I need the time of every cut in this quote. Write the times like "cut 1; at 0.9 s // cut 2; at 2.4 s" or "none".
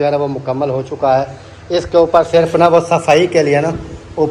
none